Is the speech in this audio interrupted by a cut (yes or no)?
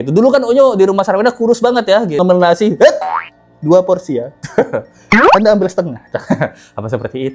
yes